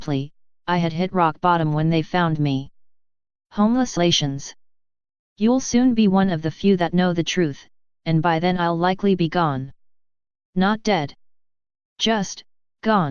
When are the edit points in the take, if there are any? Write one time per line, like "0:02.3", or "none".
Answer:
none